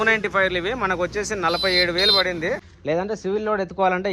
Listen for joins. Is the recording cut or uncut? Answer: cut